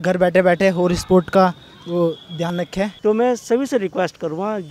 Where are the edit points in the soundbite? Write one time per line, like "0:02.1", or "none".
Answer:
0:02.6